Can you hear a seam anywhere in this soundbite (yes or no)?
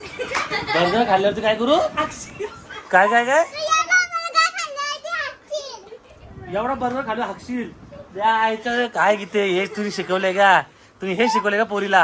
no